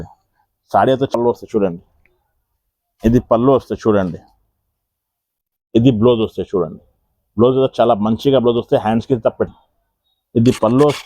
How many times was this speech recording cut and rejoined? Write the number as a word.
two